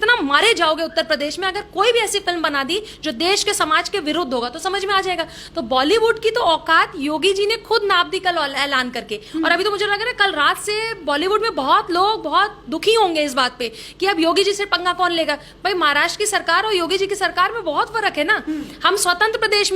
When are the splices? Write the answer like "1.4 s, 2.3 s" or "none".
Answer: none